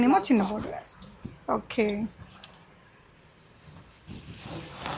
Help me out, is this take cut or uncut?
uncut